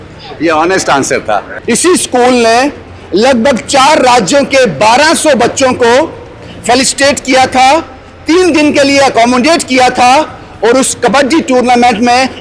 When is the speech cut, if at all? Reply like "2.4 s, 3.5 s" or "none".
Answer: 1.5 s

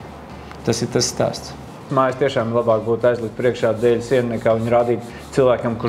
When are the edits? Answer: 1.9 s

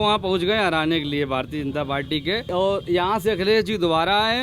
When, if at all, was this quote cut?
2.4 s

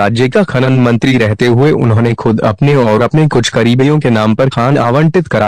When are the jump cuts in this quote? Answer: 1.3 s

